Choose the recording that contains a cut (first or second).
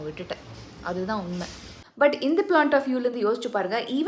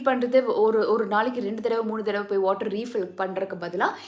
first